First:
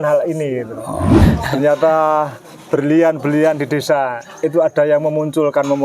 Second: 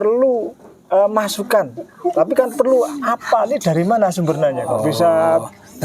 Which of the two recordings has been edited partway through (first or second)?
first